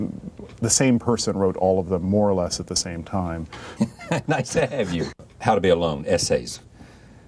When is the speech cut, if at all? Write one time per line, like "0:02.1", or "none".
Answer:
none